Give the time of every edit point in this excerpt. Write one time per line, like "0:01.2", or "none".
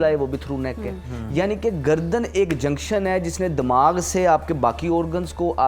none